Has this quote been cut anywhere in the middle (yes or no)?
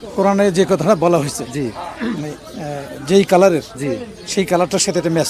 no